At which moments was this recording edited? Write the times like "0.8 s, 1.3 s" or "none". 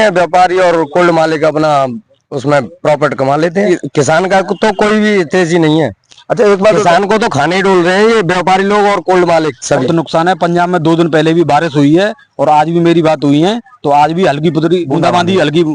3.7 s, 9.9 s, 14.9 s